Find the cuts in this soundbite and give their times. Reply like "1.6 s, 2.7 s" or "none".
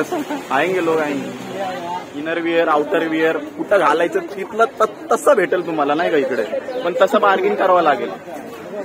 2.1 s